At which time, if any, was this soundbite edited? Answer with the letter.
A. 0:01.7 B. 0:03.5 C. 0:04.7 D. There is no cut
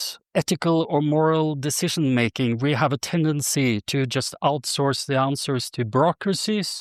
D